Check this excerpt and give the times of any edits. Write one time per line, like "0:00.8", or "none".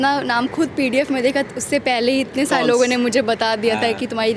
none